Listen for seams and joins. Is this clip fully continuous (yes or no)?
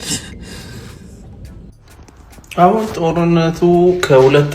no